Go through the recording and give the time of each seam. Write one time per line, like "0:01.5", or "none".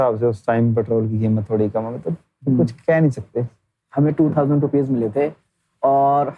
none